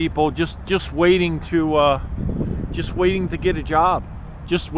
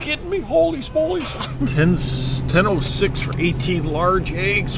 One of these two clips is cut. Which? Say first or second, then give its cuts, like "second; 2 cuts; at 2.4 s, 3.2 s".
second; 1 cut; at 1.7 s